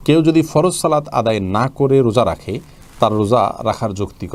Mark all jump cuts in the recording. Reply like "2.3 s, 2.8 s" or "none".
none